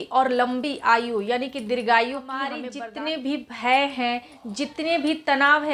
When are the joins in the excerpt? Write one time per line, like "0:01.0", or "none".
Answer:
0:02.6